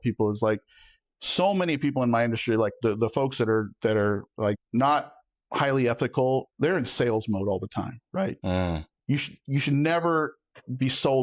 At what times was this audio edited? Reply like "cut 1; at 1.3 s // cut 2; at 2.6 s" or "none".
cut 1; at 4.6 s // cut 2; at 6.5 s

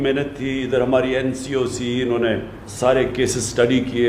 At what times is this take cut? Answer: cut 1; at 2.6 s

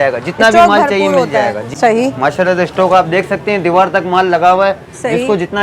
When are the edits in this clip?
cut 1; at 1.7 s

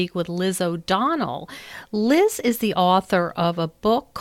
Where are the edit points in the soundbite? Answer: none

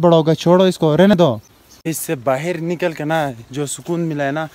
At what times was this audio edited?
cut 1; at 1.1 s

